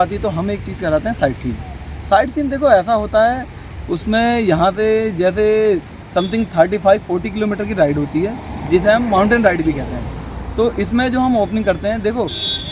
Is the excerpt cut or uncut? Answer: uncut